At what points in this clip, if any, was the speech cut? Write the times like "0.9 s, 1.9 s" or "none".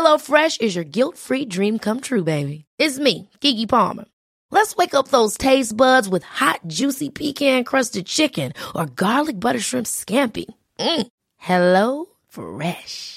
none